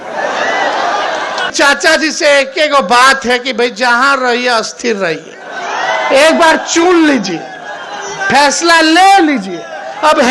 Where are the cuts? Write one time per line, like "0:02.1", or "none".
0:01.5